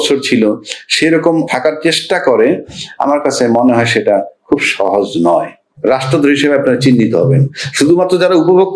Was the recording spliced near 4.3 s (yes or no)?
no